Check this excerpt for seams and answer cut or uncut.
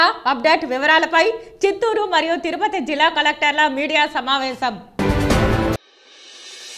uncut